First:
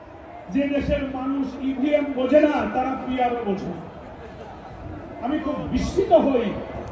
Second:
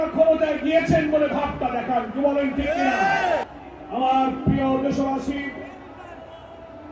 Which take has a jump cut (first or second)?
second